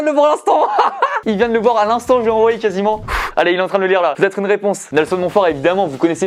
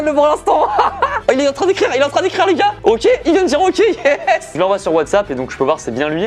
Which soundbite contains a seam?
second; 2 cuts; at 1.2 s, 4.5 s

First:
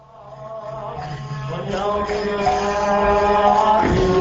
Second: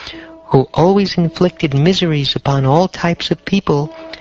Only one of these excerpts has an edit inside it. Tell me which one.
second; 1 cut; at 0.9 s

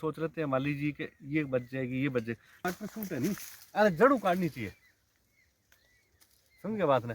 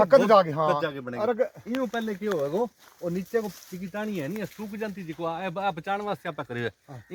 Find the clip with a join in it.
first; 1 cut; at 2.6 s

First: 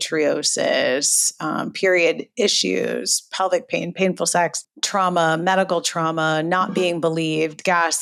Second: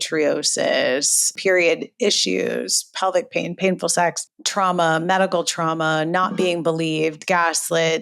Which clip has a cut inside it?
second; 1 cut; at 1.3 s

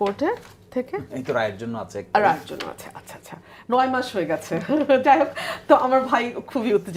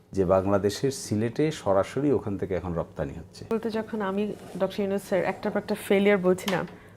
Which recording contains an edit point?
second; 1 cut; at 3.5 s

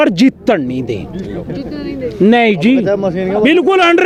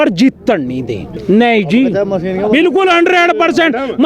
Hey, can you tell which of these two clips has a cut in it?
second; 1 cut; at 1.1 s

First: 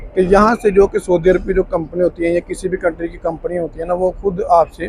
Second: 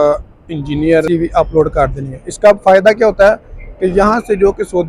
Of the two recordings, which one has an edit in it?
second; 1 cut; at 1.1 s

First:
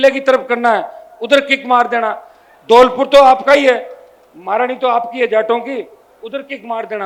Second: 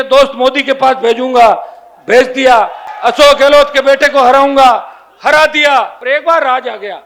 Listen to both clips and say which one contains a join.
second; 2 cuts; at 2.8 s, 6.0 s

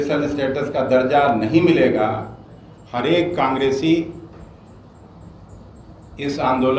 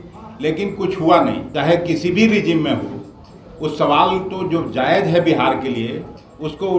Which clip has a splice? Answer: second; 1 cut; at 1.5 s

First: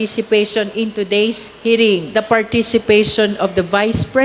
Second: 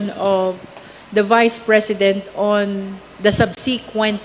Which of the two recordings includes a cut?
first; 1 cut; at 2.1 s

